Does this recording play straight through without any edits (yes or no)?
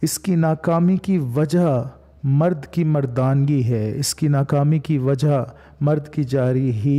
yes